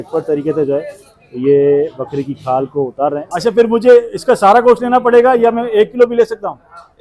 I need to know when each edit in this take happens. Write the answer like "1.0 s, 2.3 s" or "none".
3.3 s